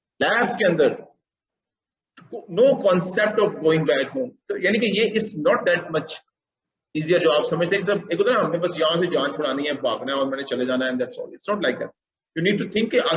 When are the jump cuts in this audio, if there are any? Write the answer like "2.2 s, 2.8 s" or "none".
none